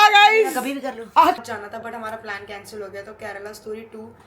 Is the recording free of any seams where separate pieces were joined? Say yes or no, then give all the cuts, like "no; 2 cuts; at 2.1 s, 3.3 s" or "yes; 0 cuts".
no; 1 cut; at 1.4 s